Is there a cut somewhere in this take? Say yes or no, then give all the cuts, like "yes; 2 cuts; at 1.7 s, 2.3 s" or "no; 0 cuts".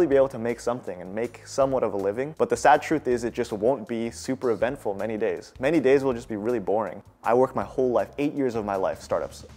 yes; 1 cut; at 7.0 s